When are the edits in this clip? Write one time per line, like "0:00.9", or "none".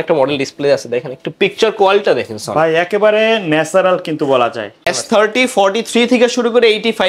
0:04.7